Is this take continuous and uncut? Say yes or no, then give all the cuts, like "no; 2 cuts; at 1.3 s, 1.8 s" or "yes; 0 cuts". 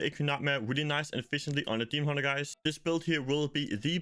no; 1 cut; at 2.5 s